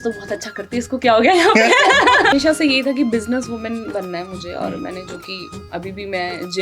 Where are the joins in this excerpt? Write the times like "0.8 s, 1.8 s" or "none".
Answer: 2.3 s